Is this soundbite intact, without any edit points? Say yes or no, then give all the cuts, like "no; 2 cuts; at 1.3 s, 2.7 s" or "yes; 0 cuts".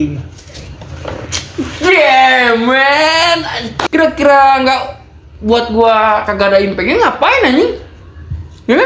no; 1 cut; at 3.7 s